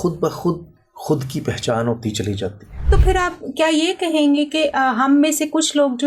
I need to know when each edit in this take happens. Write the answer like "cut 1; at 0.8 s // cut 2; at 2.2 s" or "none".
cut 1; at 2.8 s

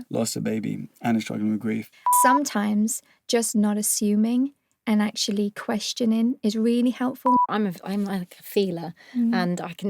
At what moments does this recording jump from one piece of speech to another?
cut 1; at 2.2 s // cut 2; at 7.4 s

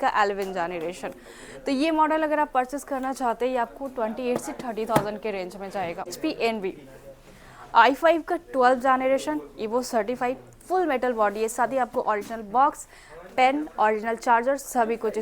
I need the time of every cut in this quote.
cut 1; at 6.1 s

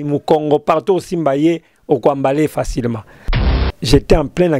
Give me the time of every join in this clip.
cut 1; at 3.4 s

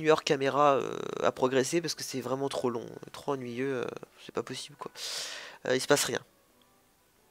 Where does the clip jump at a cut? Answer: none

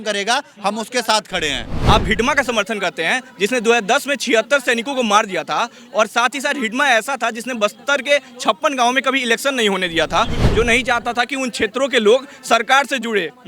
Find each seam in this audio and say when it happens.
cut 1; at 1.7 s // cut 2; at 10.4 s

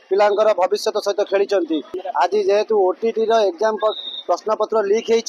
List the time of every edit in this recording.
cut 1; at 2.0 s

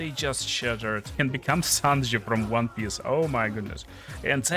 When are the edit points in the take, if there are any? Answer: cut 1; at 1.1 s

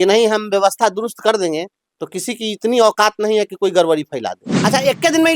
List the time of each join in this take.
cut 1; at 4.4 s

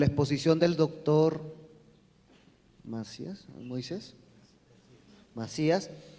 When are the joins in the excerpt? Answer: cut 1; at 3.5 s

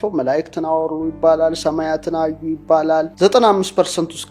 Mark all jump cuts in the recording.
cut 1; at 3.1 s

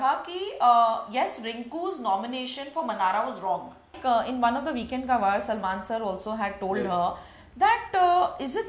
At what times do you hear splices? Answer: cut 1; at 3.9 s

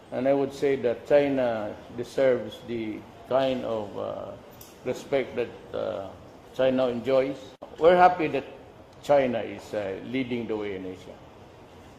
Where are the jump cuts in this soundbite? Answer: cut 1; at 4.4 s

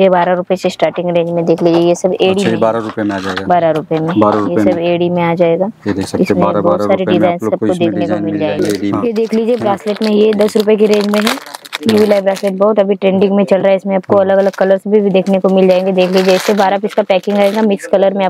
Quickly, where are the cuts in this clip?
cut 1; at 9.0 s

